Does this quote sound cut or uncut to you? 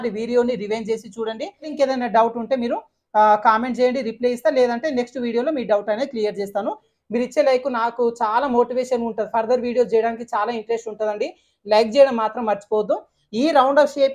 cut